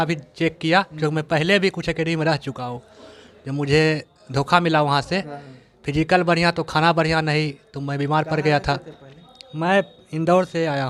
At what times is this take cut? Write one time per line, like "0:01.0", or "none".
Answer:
none